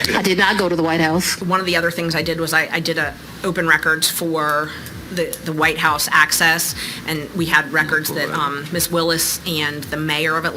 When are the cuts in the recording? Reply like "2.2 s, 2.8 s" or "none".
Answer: 1.4 s